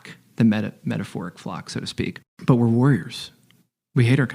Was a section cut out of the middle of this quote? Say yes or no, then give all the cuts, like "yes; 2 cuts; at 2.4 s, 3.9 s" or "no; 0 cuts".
yes; 1 cut; at 2.3 s